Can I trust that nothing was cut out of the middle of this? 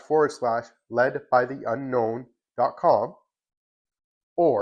yes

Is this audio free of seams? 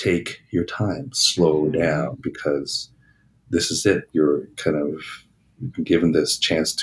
yes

